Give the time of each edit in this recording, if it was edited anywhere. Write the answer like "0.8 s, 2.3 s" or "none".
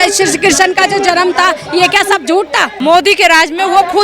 2.6 s